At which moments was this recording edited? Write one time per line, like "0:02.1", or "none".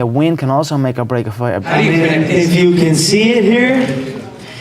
0:01.6